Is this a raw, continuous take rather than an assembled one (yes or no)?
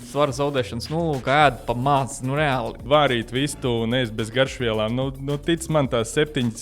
no